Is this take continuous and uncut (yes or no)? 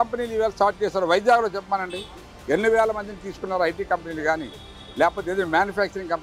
yes